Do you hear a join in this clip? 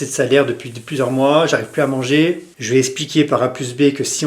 yes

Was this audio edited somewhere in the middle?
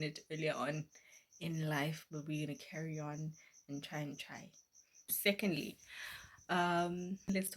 yes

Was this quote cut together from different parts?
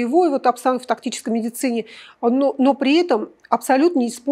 no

